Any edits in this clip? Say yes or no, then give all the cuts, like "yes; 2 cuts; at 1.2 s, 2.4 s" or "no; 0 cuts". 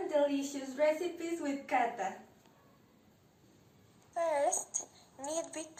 no; 0 cuts